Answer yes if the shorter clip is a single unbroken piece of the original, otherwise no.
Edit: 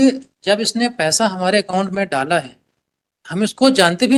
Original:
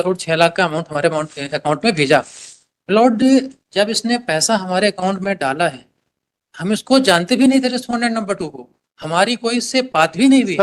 yes